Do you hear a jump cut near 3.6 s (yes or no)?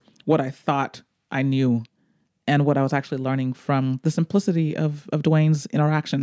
no